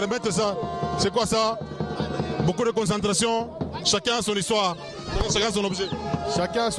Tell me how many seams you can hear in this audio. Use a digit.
0